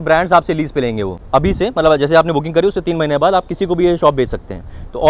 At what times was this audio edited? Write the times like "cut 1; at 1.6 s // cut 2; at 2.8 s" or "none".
cut 1; at 1.1 s